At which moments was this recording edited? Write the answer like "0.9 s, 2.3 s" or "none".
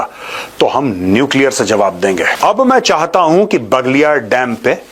2.3 s